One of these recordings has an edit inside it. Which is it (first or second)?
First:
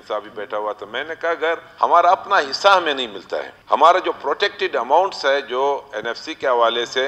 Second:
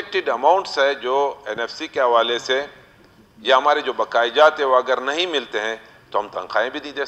first